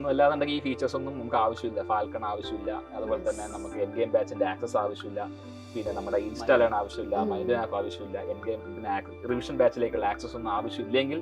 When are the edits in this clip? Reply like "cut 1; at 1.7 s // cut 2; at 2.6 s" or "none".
none